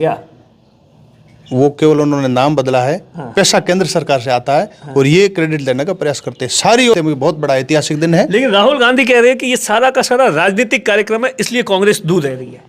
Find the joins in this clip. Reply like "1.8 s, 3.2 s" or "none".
6.9 s